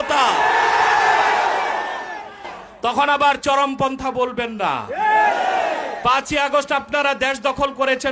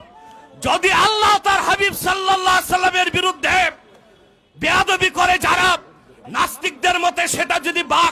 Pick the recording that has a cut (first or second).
first